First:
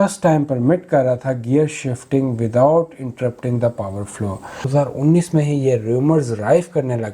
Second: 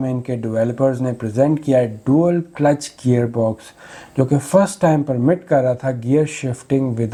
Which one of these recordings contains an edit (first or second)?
first